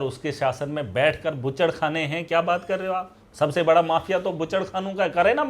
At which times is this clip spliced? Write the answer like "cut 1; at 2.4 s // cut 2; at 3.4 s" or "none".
none